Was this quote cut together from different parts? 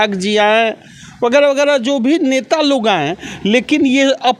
no; 0 cuts

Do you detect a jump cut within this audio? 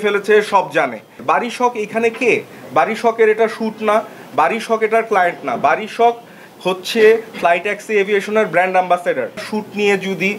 yes; 2 cuts; at 1.2 s, 9.4 s

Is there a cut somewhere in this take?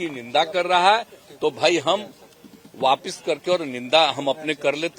no; 0 cuts

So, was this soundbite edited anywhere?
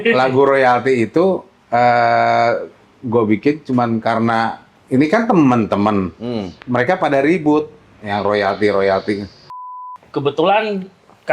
yes; 3 cuts; at 1.5 s, 4.7 s, 9.7 s

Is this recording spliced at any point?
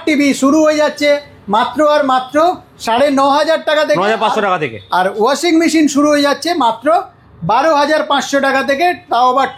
no; 0 cuts

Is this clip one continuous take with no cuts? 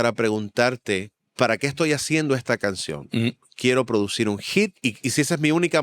no; 2 cuts; at 1.2 s, 4.8 s

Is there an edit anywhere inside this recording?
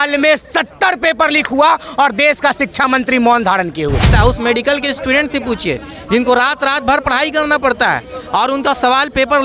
yes; 1 cut; at 4.1 s

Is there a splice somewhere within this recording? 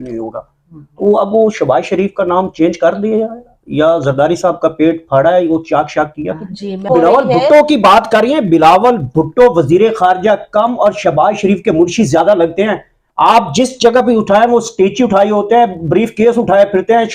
yes; 1 cut; at 6.8 s

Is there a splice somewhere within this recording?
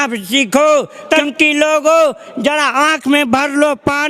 yes; 1 cut; at 1.1 s

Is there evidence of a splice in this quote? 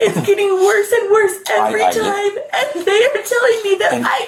no; 0 cuts

